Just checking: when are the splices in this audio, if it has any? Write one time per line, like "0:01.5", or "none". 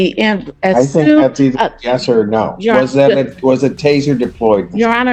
none